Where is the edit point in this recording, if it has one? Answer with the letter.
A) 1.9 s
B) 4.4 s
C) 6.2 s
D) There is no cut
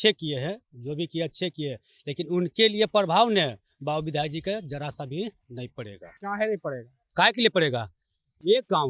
D